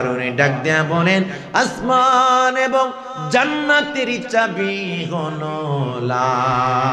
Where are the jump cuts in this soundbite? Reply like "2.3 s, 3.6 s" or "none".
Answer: none